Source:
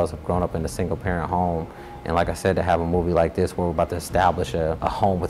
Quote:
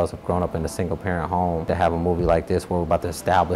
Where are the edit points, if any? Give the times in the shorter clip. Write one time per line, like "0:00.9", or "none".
0:01.7